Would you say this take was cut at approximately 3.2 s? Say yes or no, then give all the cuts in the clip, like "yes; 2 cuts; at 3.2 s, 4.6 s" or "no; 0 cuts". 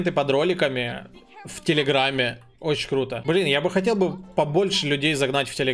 yes; 1 cut; at 3.2 s